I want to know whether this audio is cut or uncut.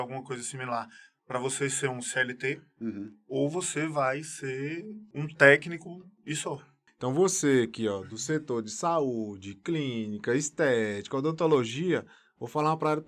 cut